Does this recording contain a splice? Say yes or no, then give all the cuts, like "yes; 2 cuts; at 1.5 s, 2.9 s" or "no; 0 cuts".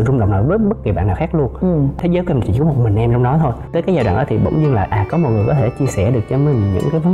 yes; 2 cuts; at 2.0 s, 3.6 s